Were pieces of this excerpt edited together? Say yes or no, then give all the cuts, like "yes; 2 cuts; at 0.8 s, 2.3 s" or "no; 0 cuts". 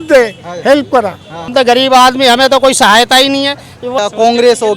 yes; 2 cuts; at 1.5 s, 4.0 s